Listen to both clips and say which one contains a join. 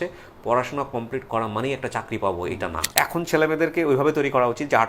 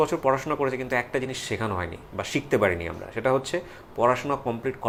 first; 1 cut; at 2.8 s

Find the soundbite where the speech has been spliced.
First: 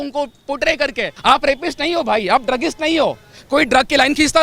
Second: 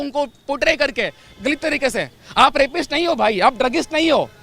first; 1 cut; at 1.1 s

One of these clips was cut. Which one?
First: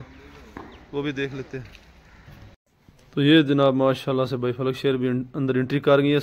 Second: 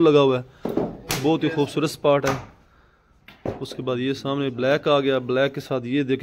first; 1 cut; at 2.5 s

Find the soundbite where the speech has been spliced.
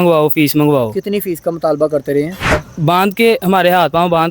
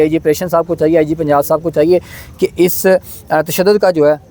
first; 1 cut; at 2.5 s

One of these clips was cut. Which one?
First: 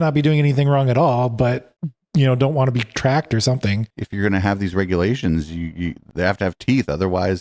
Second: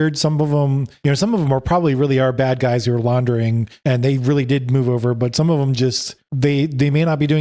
first; 1 cut; at 3.9 s

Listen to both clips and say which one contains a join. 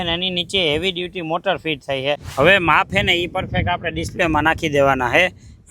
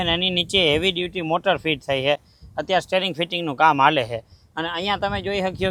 first; 1 cut; at 2.3 s

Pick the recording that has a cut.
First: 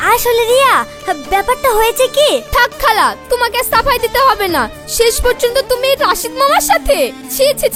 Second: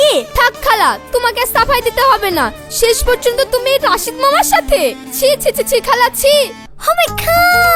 second; 1 cut; at 6.7 s

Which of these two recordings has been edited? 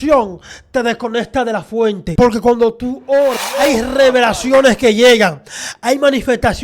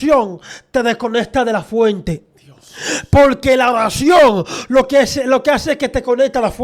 first; 2 cuts; at 2.0 s, 3.4 s

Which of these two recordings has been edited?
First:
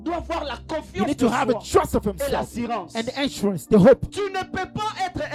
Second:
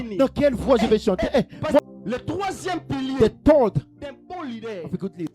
second; 1 cut; at 1.8 s

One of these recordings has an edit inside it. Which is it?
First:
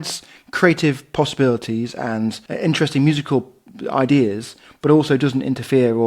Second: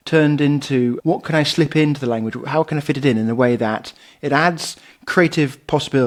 first; 1 cut; at 2.4 s

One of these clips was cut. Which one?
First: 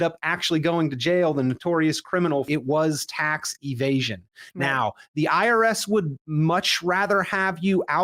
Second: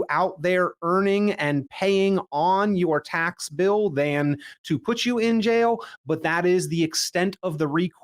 first; 1 cut; at 2.5 s

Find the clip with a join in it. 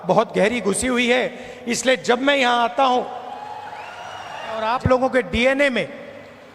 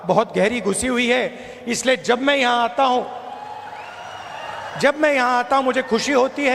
first; 1 cut; at 4.7 s

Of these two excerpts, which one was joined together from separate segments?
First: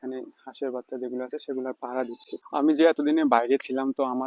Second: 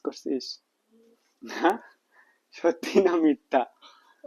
first; 1 cut; at 2.3 s

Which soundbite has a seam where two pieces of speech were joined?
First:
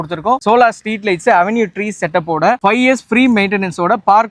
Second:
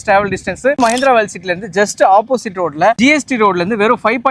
second; 2 cuts; at 0.8 s, 3.0 s

